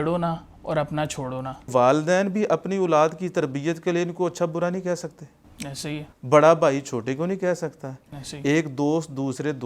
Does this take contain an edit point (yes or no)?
yes